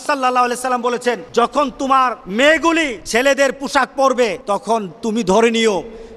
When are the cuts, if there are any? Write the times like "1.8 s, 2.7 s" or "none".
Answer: 1.2 s, 2.2 s, 3.0 s, 4.4 s

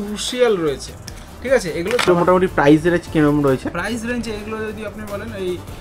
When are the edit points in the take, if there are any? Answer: 2.1 s

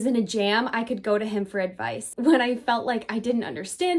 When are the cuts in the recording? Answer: 2.1 s

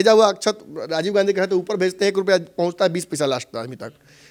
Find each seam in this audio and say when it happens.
none

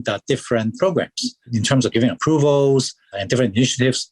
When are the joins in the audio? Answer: none

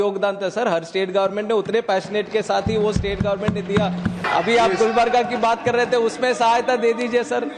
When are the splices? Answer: 4.2 s

